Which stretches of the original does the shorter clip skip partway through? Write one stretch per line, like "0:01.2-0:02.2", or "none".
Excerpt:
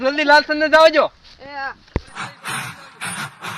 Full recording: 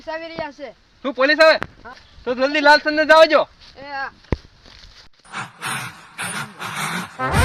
0:04.5-0:05.3